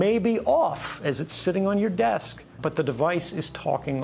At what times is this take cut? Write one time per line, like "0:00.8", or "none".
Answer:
0:02.6